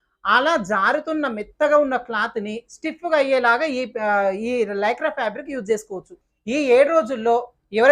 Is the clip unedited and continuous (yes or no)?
no